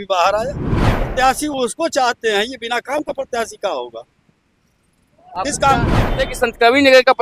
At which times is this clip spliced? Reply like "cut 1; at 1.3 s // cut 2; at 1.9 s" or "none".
cut 1; at 1.1 s // cut 2; at 6.3 s